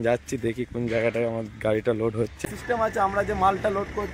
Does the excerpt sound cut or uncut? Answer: cut